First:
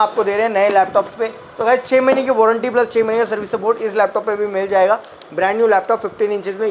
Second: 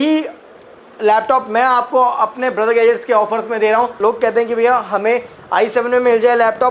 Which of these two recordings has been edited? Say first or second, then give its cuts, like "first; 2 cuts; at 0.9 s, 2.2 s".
second; 1 cut; at 3.9 s